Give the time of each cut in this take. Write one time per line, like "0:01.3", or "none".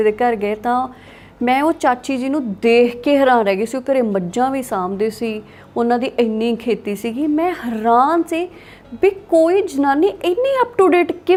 none